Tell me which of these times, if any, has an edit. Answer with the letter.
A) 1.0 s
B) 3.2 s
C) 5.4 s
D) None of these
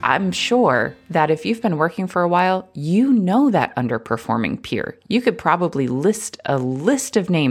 A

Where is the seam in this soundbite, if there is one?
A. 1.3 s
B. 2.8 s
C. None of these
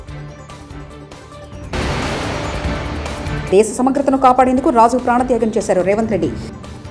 A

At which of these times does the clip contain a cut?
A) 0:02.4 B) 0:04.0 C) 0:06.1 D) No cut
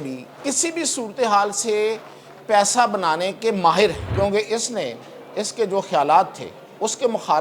B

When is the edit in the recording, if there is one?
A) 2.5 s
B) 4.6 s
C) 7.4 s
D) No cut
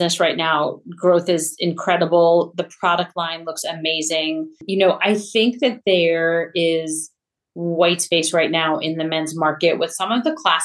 B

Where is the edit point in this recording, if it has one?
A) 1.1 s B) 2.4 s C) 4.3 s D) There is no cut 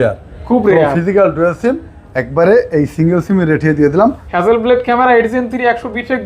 C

